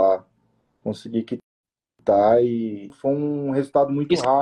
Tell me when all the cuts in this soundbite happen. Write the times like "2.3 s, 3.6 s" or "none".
2.9 s